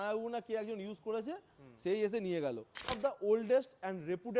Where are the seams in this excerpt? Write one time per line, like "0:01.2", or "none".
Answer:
0:02.9